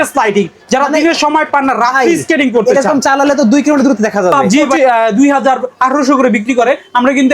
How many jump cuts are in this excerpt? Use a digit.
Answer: 1